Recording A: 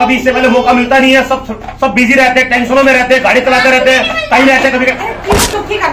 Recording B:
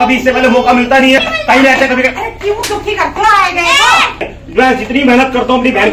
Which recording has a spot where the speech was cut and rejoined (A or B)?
B